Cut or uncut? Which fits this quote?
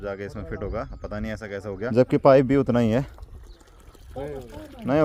uncut